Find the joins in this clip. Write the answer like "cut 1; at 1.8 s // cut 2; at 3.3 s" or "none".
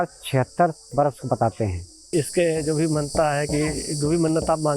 cut 1; at 2.1 s